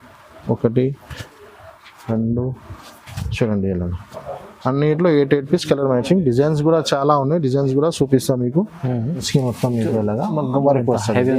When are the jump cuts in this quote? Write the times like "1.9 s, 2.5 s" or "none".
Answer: 9.2 s

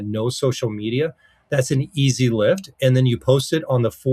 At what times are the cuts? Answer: none

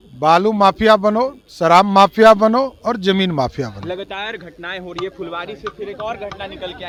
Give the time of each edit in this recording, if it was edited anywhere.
none

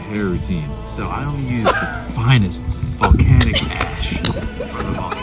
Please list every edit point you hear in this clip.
none

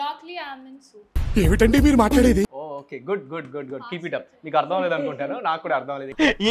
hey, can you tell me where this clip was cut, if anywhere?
2.6 s

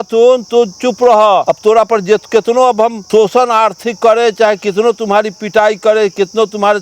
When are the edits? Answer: 1.5 s, 3.0 s

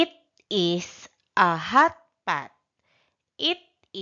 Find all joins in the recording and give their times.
2.1 s

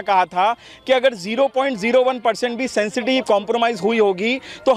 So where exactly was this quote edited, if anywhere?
none

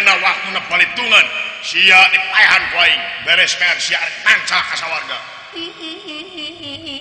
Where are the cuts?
none

